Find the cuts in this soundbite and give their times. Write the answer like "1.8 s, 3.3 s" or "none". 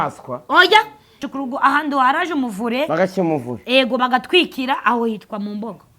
1.2 s